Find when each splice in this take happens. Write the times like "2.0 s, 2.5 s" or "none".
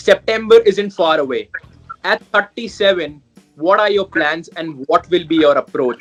none